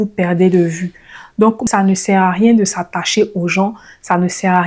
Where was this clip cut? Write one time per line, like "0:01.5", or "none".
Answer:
0:01.7